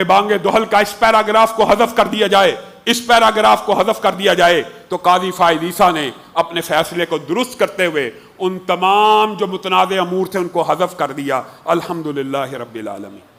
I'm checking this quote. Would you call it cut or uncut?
uncut